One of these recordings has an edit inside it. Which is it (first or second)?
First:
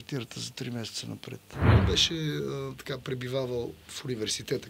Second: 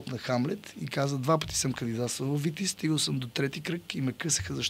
first